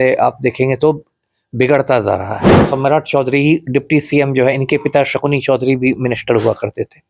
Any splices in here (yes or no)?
yes